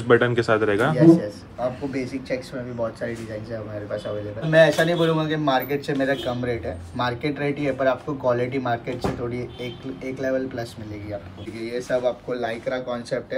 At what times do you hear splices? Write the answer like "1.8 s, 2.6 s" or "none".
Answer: 4.5 s, 11.4 s